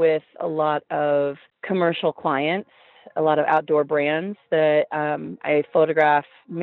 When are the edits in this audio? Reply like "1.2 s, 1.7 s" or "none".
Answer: 1.5 s

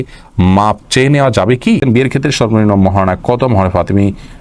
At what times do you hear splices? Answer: 1.8 s

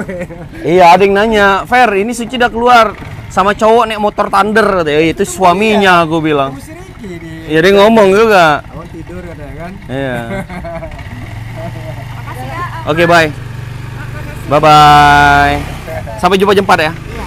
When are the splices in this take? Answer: none

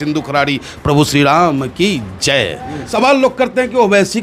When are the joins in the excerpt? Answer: 2.8 s

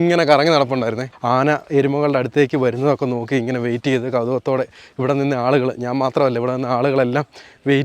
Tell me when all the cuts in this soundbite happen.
1.0 s

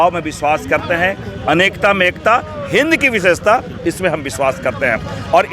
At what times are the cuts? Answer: none

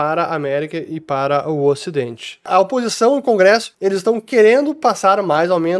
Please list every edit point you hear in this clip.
2.4 s, 3.7 s

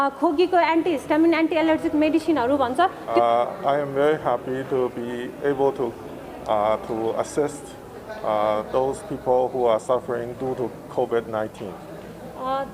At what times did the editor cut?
3.0 s

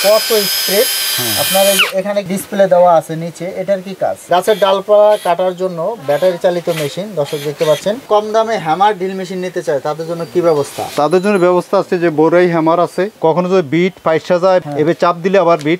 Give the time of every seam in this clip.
4.2 s, 8.0 s, 13.1 s

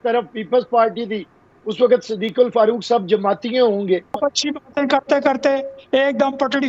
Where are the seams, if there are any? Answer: 4.2 s

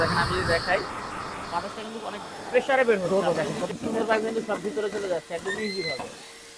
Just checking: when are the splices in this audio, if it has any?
3.1 s

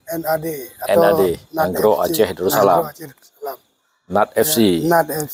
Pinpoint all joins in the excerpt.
none

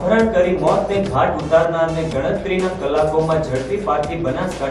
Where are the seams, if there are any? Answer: none

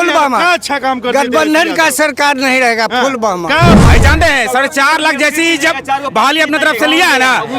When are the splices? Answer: 3.8 s

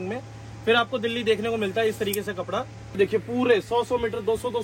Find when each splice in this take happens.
2.9 s

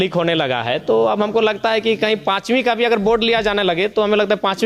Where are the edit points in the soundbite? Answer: none

